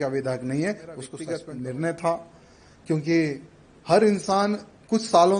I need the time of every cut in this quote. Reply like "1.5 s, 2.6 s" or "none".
1.1 s